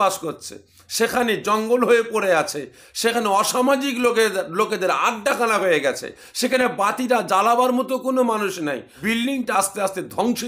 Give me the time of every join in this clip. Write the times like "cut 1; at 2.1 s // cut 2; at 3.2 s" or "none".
cut 1; at 8.9 s